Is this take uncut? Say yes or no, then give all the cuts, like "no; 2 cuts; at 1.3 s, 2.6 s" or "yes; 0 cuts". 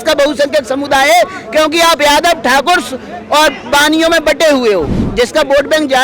no; 1 cut; at 5.0 s